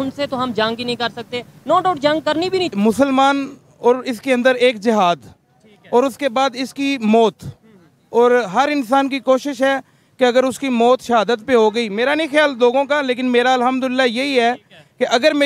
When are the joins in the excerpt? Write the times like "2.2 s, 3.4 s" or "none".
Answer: 2.7 s